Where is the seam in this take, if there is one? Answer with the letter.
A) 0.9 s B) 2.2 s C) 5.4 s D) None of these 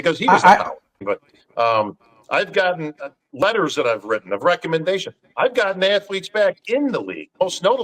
A